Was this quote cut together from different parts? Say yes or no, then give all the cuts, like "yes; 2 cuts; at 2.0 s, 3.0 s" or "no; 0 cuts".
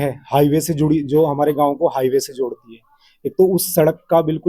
no; 0 cuts